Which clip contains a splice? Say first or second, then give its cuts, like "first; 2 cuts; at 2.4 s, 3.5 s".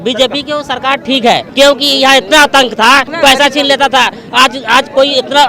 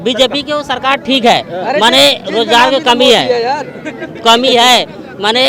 first; 2 cuts; at 1.5 s, 3.1 s